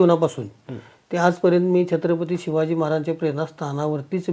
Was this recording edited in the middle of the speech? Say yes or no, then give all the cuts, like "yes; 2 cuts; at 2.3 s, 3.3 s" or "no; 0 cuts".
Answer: no; 0 cuts